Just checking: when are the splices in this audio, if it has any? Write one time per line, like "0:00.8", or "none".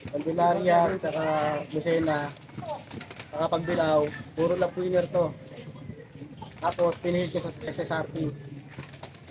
0:07.6